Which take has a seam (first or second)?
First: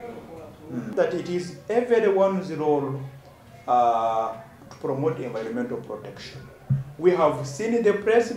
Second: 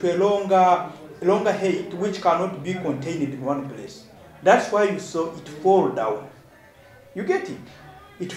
first